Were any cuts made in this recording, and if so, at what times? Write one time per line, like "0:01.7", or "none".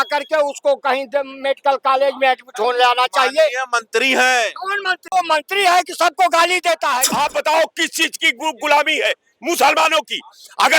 0:05.1
0:07.1